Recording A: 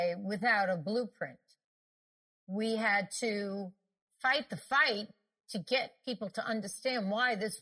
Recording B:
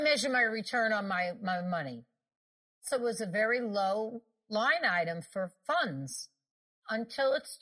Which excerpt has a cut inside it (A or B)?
B